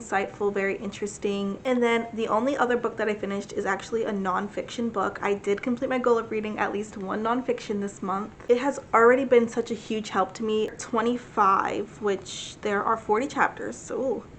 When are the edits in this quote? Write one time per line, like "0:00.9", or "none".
0:01.6
0:08.3
0:10.8